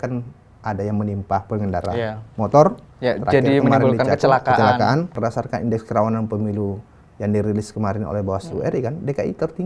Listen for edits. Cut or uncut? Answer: cut